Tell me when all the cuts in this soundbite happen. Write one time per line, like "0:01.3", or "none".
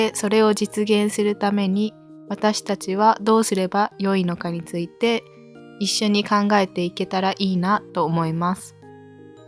0:08.6